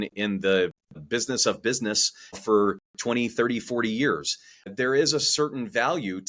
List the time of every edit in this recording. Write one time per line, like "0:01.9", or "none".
0:01.0
0:02.4
0:04.7